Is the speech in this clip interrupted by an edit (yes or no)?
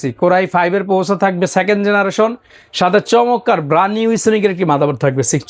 no